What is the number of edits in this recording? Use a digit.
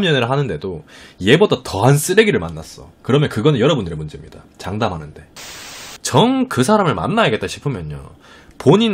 1